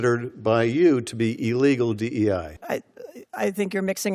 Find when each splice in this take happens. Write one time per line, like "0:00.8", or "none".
0:02.5

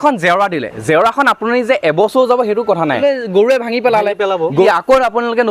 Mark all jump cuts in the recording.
0:03.0
0:04.7

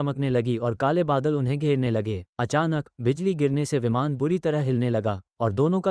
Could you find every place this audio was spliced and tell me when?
0:02.2

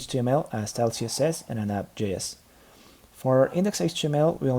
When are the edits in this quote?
0:01.0
0:03.6

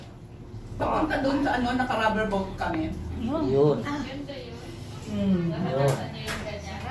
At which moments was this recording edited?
none

